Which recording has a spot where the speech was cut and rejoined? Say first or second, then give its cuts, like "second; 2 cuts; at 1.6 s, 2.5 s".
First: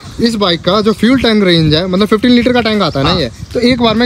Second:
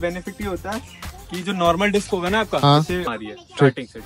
second; 1 cut; at 3.1 s